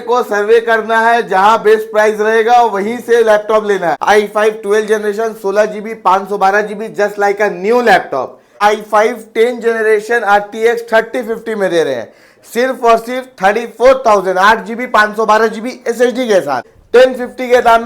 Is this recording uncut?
no; 3 cuts; at 4.0 s, 8.6 s, 16.7 s

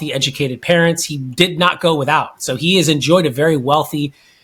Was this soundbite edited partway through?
no; 0 cuts

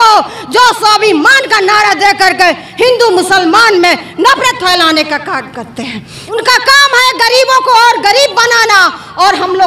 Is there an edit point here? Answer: yes; 1 cut; at 6.2 s

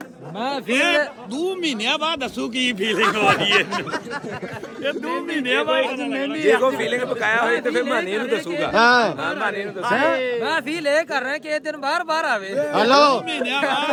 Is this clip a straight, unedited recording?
yes; 0 cuts

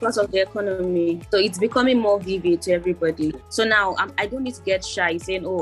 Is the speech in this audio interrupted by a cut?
yes; 2 cuts; at 1.2 s, 3.4 s

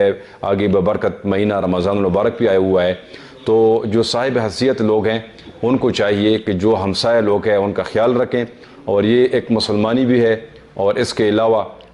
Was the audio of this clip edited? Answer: no; 0 cuts

